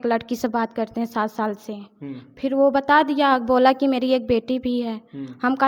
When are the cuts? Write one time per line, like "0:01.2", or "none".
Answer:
none

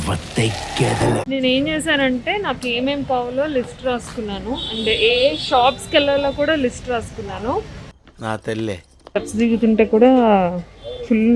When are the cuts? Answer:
0:01.3
0:08.9

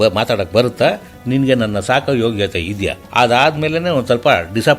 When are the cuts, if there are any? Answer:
0:03.0

